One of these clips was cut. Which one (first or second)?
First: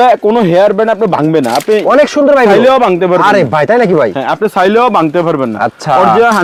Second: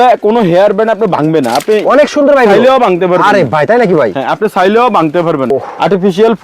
second